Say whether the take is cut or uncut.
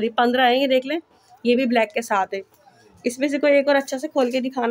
uncut